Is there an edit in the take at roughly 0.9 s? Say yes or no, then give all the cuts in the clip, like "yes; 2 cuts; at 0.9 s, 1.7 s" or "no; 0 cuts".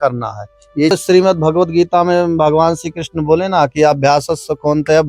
yes; 1 cut; at 0.9 s